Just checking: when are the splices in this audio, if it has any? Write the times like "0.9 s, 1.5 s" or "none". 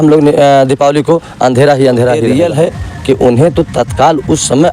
2.2 s

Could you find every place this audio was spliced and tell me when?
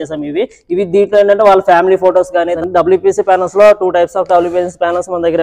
2.6 s

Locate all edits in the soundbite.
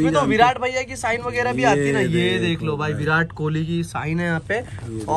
none

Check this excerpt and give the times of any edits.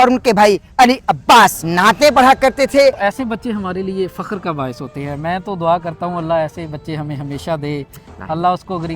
1.6 s, 3.0 s

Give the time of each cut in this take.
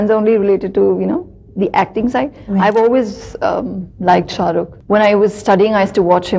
4.8 s

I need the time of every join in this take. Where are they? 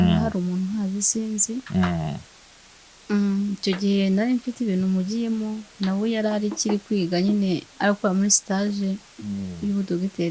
none

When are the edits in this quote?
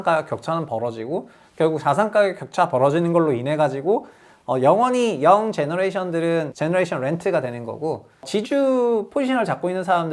none

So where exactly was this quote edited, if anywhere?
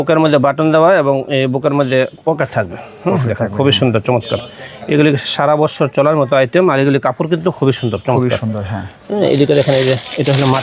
none

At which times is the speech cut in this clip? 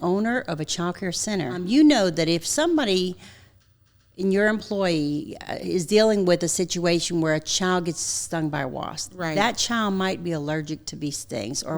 1.6 s

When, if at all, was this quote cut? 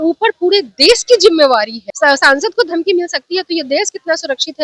1.8 s

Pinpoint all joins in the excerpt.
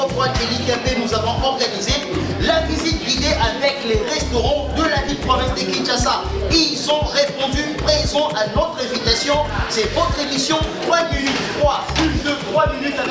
none

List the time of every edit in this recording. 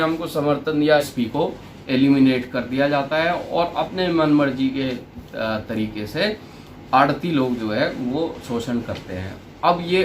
1.0 s

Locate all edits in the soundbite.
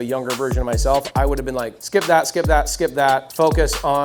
1.8 s, 3.3 s

